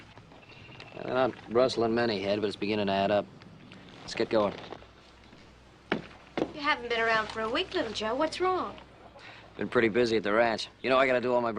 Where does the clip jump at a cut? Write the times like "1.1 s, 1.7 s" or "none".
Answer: none